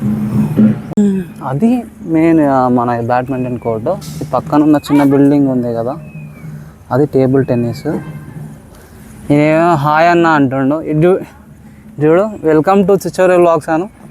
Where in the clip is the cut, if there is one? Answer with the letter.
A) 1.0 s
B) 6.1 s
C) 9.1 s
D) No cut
A